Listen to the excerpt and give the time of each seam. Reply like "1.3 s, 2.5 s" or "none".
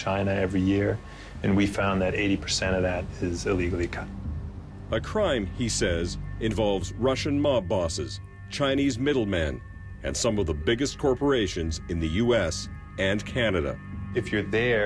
1.3 s